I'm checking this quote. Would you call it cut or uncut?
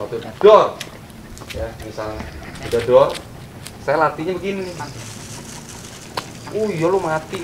uncut